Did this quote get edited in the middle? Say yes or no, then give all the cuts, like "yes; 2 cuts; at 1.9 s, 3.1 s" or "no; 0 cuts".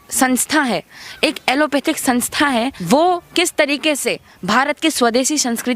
yes; 1 cut; at 2.8 s